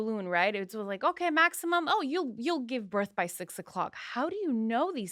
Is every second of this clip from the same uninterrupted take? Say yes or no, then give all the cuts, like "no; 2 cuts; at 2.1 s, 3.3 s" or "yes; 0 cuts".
yes; 0 cuts